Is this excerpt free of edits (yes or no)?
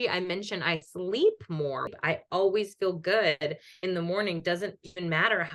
no